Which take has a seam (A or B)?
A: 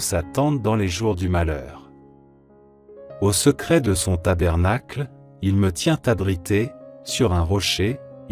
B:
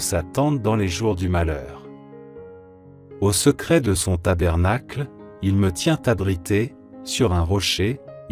A